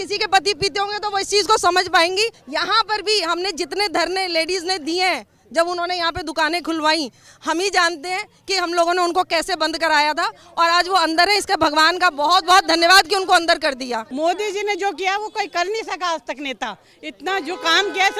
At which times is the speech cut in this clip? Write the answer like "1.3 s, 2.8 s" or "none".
2.4 s, 14.0 s

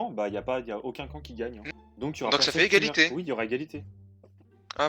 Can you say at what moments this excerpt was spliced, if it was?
1.6 s

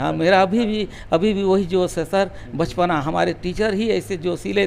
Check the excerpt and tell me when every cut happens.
none

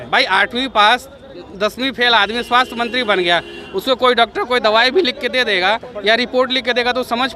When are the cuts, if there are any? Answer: none

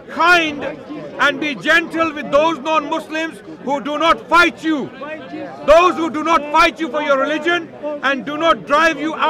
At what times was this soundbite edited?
none

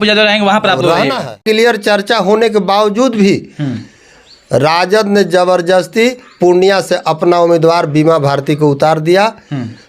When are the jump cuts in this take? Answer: 1.4 s

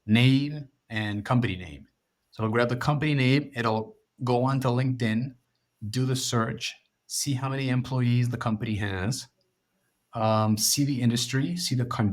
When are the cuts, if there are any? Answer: none

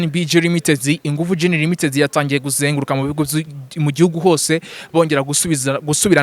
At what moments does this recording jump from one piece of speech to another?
none

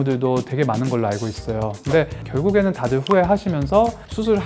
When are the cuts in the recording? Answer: 2.0 s

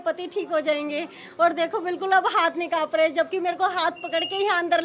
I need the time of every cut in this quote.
none

